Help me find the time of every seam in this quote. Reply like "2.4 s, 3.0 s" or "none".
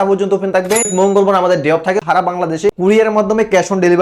0.9 s, 2.0 s